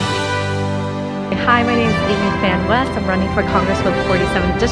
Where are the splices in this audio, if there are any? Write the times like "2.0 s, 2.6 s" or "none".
none

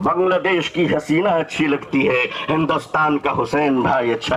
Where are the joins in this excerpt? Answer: none

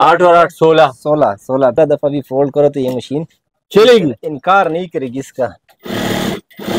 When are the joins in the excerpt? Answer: 1.7 s

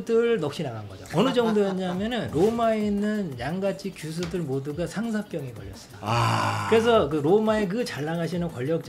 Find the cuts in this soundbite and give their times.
1.0 s

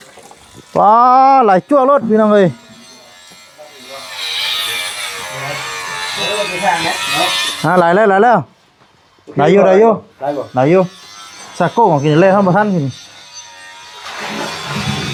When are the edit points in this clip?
none

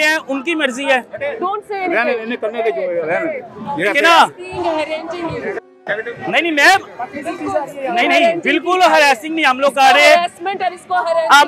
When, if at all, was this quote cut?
none

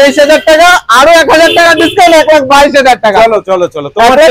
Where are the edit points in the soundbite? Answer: none

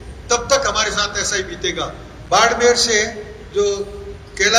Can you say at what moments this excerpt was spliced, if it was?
2.1 s

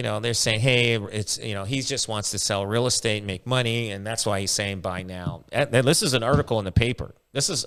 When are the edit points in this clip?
none

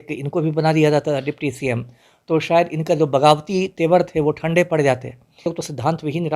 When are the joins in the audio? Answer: 5.4 s

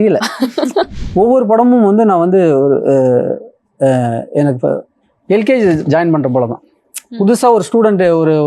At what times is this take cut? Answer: 1.0 s

